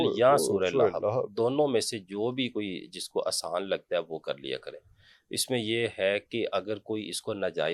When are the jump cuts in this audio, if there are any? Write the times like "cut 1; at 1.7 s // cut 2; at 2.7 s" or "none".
none